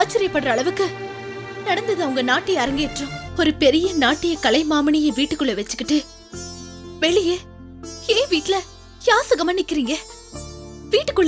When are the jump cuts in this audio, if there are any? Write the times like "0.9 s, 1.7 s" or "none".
3.2 s

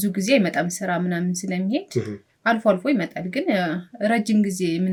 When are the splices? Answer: none

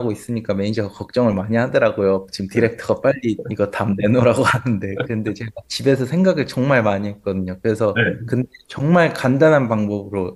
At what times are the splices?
none

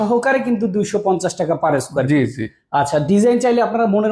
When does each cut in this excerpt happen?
none

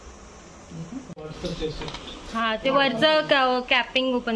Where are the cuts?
1.2 s

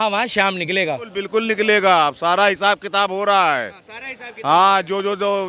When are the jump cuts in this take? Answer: 1.2 s

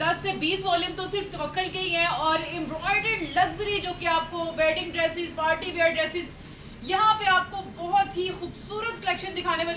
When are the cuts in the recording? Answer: none

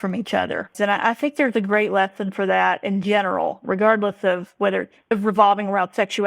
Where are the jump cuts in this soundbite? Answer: 1.0 s, 3.6 s, 5.0 s

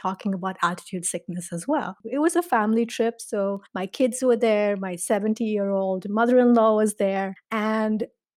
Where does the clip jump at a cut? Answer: 2.0 s

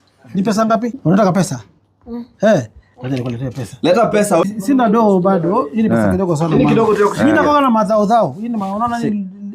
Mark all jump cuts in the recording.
1.0 s, 4.4 s

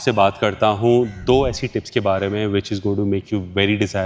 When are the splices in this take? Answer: none

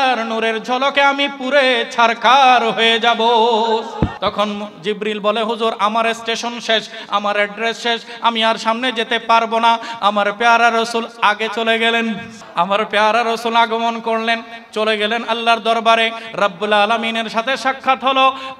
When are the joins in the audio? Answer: 4.2 s, 12.3 s

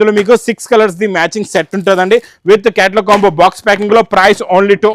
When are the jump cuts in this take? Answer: none

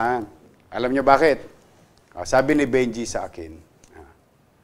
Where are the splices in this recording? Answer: none

